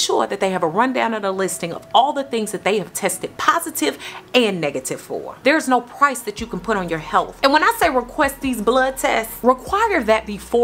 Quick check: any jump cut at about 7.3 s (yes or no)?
yes